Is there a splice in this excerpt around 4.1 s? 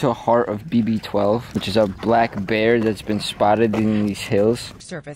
no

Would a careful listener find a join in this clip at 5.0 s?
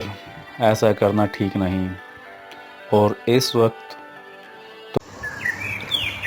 yes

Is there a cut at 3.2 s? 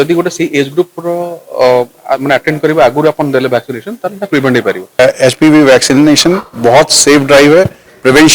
no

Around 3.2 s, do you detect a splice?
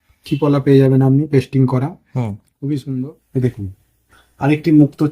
yes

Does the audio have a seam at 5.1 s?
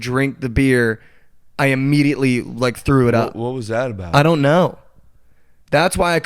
yes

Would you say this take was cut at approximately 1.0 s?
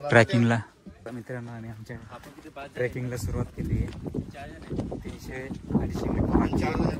yes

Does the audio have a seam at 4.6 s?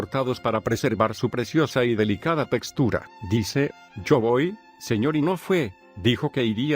yes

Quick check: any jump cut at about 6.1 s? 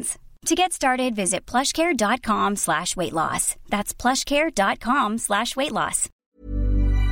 yes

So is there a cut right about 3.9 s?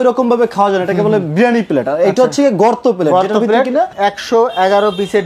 yes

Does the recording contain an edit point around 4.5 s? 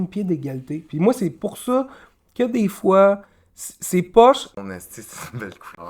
yes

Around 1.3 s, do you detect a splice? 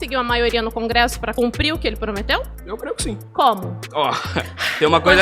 yes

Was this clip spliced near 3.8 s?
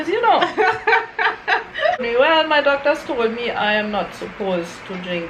no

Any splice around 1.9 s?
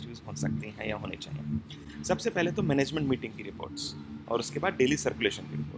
no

